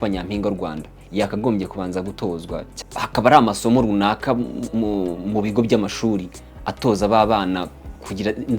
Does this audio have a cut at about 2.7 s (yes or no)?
yes